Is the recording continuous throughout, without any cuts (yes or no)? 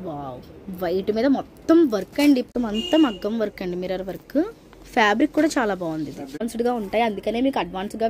no